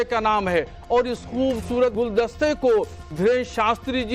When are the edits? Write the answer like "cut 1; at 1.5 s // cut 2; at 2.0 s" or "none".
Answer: cut 1; at 2.0 s // cut 2; at 3.0 s